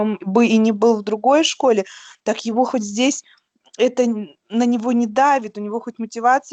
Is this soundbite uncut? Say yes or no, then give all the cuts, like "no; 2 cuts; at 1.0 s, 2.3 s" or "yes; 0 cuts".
yes; 0 cuts